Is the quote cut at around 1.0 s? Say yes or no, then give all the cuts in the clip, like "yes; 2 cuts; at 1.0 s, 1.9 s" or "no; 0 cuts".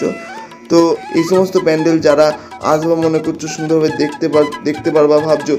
yes; 1 cut; at 1.0 s